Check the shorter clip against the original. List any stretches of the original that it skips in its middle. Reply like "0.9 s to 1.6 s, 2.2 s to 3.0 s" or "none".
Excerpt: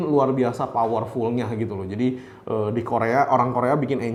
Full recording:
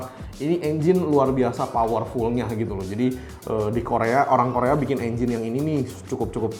none